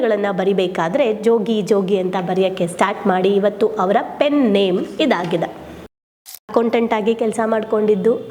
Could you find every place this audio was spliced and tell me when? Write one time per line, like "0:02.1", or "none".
0:06.1